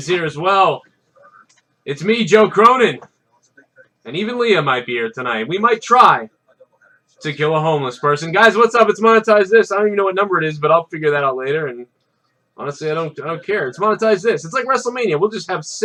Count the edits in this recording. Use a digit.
0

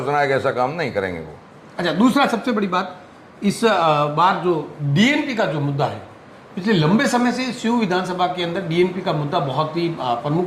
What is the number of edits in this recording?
0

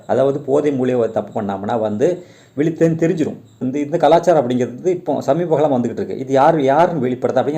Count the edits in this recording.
1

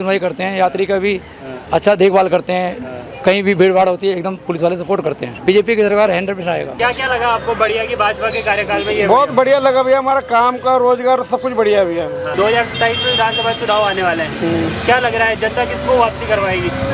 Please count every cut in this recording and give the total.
3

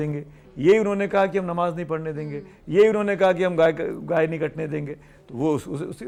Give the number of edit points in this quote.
0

